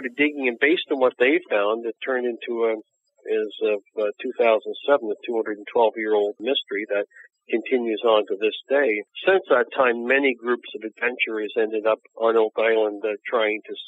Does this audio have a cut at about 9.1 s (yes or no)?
yes